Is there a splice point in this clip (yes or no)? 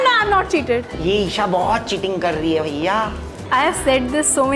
yes